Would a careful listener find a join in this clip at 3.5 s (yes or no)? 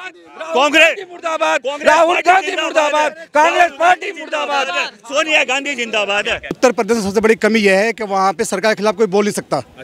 no